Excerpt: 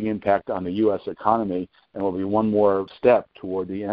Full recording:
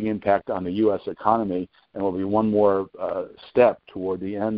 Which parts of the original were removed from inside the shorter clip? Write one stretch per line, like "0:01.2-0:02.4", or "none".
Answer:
0:02.9-0:03.4